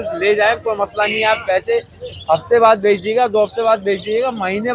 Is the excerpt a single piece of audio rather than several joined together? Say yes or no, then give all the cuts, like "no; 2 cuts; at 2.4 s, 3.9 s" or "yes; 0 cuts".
yes; 0 cuts